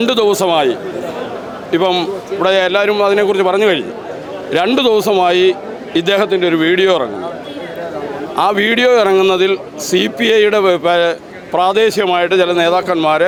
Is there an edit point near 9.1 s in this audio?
no; 0 cuts

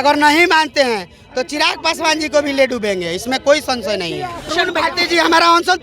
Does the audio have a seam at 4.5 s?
yes; 1 cut; at 4.5 s

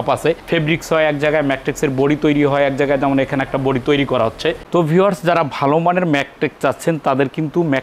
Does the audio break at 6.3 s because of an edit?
no; 1 cut; at 4.6 s

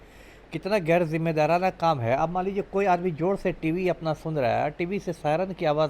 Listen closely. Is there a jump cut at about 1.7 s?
no; 0 cuts

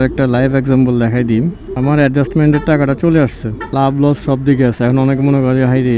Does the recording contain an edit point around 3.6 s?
yes; 2 cuts; at 1.7 s, 3.6 s

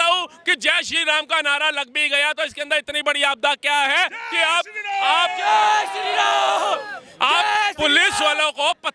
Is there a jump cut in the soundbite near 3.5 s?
no; 0 cuts

